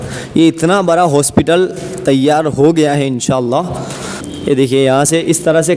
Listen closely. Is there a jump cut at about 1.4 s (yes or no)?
no